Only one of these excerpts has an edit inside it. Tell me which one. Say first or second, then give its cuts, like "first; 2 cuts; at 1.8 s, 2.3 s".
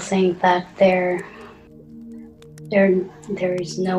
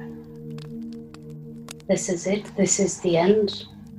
first; 2 cuts; at 1.5 s, 2.7 s